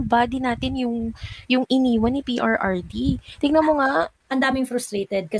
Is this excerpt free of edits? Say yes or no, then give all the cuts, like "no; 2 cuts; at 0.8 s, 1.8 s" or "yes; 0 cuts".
no; 1 cut; at 4.2 s